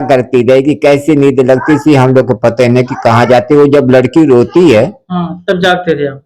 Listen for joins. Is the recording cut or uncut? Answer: uncut